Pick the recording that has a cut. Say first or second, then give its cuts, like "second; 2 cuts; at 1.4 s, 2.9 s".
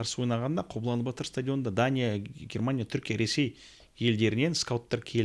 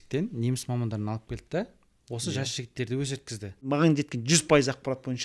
second; 1 cut; at 3.7 s